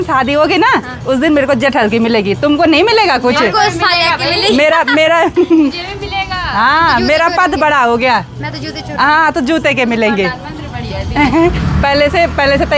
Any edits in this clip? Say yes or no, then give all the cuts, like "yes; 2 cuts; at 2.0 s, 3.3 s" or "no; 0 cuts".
no; 0 cuts